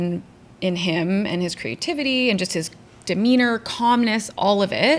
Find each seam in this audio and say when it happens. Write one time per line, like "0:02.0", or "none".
none

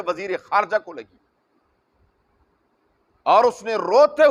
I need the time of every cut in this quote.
none

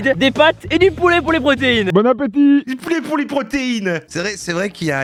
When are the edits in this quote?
none

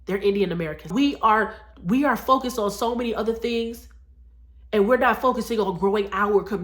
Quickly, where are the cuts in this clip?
0:00.9

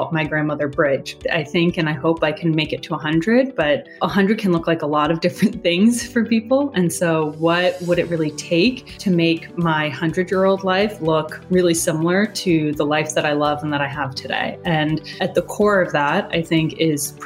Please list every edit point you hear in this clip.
0:01.2

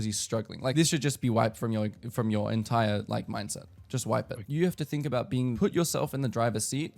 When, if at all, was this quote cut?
0:00.7
0:04.4
0:05.5

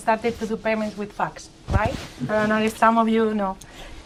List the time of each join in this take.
none

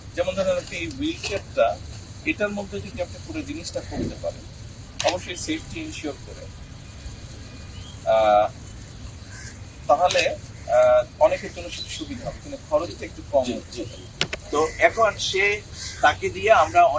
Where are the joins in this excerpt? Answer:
0:14.4

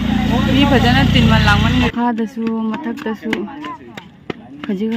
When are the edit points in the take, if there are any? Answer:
0:01.9

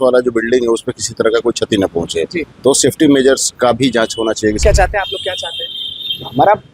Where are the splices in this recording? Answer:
0:04.6

